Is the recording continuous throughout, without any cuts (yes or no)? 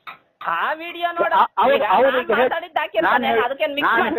yes